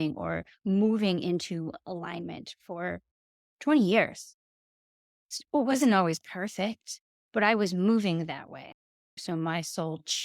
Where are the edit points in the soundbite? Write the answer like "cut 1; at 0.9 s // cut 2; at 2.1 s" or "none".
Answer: cut 1; at 8.7 s